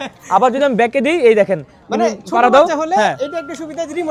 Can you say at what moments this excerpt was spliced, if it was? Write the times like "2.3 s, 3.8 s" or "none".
none